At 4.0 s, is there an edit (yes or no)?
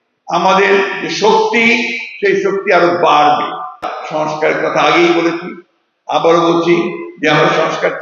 yes